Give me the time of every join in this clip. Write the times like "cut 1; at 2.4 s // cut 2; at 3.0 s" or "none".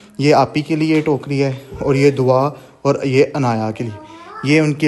none

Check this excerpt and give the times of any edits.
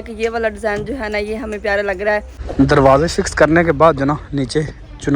cut 1; at 2.4 s

